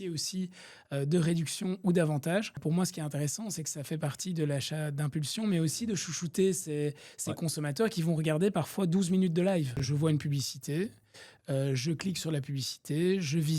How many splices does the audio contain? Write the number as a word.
two